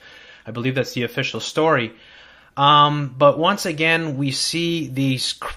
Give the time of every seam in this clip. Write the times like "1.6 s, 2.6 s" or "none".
4.3 s